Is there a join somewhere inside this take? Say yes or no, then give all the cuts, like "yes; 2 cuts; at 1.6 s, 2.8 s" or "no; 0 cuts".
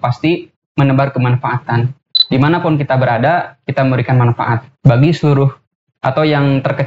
yes; 1 cut; at 2.1 s